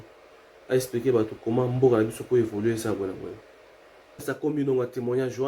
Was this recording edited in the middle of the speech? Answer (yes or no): yes